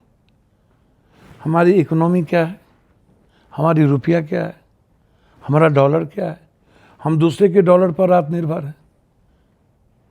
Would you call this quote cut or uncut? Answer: uncut